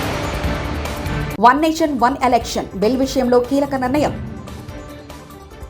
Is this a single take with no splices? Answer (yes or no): no